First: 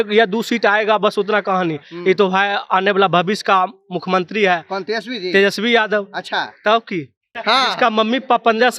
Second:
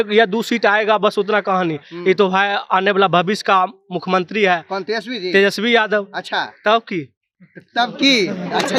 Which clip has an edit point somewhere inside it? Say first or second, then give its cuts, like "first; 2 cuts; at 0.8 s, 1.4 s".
first; 1 cut; at 7.3 s